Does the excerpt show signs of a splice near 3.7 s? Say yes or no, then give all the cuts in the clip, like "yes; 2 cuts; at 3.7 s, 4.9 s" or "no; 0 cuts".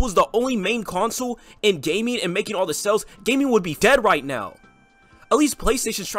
yes; 1 cut; at 3.7 s